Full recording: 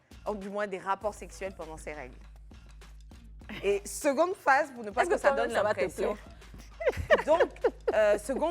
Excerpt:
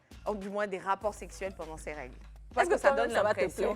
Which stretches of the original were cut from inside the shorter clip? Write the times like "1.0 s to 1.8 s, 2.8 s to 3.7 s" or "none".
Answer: 2.4 s to 4.8 s